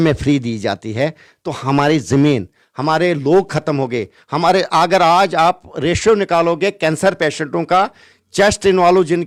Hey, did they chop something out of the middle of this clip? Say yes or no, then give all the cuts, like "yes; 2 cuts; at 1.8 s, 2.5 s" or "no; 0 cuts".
no; 0 cuts